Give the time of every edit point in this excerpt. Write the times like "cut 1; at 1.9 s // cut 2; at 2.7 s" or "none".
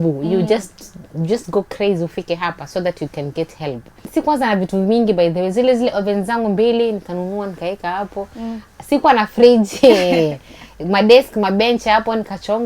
cut 1; at 4.1 s